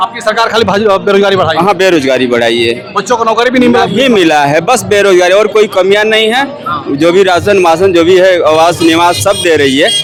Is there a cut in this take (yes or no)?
no